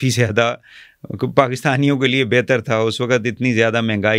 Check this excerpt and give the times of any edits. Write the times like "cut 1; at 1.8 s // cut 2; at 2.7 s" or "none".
none